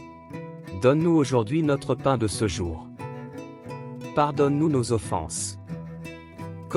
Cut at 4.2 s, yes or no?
yes